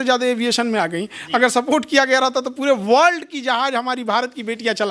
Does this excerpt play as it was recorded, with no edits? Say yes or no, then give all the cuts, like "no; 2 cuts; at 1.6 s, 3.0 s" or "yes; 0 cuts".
yes; 0 cuts